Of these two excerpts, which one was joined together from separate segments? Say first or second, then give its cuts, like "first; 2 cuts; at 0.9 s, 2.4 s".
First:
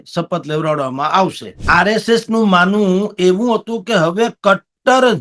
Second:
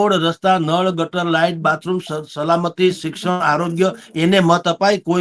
first; 1 cut; at 1.5 s